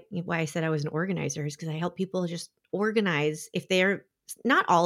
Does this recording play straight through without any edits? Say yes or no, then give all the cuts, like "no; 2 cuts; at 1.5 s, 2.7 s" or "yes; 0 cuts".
yes; 0 cuts